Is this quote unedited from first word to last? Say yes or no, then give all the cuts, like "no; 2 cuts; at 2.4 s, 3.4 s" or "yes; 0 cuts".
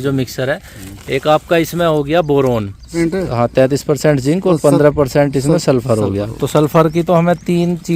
no; 1 cut; at 2.9 s